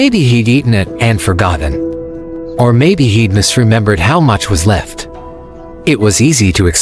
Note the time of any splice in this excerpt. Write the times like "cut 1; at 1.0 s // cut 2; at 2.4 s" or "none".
cut 1; at 4.4 s